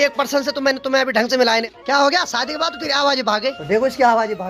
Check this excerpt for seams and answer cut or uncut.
cut